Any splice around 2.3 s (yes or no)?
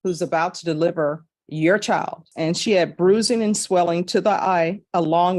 yes